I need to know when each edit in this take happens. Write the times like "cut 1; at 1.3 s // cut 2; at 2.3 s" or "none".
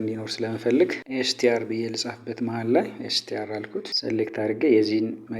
cut 1; at 1.0 s // cut 2; at 3.9 s